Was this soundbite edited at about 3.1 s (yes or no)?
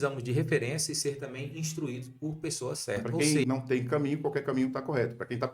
yes